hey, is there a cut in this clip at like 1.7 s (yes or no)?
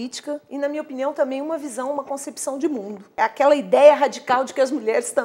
no